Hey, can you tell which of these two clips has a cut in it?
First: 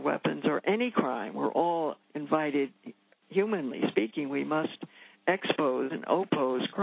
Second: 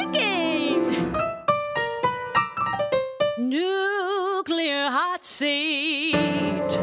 first; 1 cut; at 2.1 s

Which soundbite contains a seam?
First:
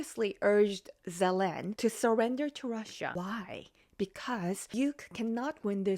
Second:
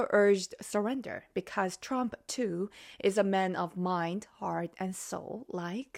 first; 3 cuts; at 1.7 s, 3.1 s, 4.7 s

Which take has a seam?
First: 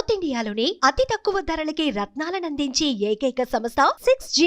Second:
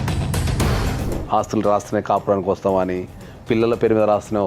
second; 1 cut; at 1.0 s

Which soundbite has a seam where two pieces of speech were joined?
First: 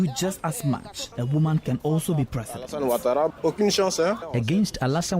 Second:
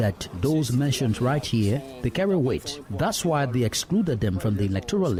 first; 3 cuts; at 1.1 s, 3.4 s, 4.2 s

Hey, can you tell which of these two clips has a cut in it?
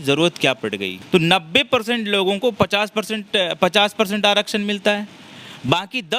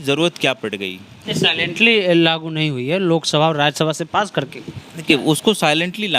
first; 1 cut; at 0.9 s

